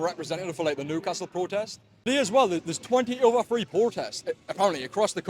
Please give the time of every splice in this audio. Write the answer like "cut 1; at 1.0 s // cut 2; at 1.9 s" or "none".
cut 1; at 2.0 s